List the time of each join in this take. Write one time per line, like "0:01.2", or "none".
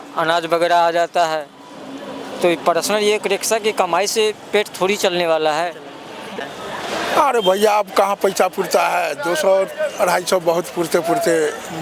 0:06.3